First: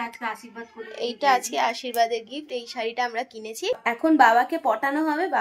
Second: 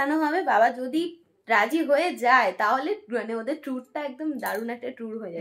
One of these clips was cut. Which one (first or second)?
first